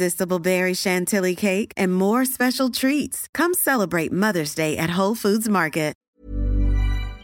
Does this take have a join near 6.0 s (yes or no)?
yes